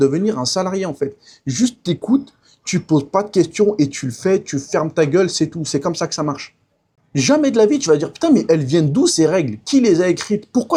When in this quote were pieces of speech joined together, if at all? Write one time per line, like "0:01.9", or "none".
none